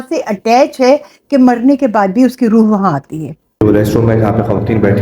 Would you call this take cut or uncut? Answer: cut